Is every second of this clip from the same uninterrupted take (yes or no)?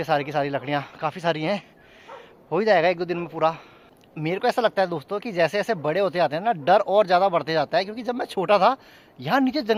yes